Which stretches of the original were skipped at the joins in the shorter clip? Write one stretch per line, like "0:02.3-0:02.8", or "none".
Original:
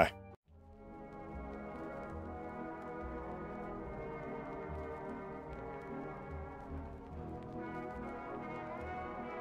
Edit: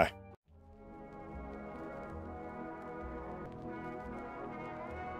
0:03.5-0:07.4